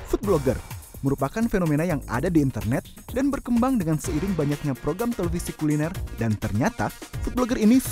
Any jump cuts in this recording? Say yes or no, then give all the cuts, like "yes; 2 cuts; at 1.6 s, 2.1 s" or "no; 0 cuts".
no; 0 cuts